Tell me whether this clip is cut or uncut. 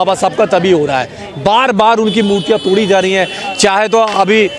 uncut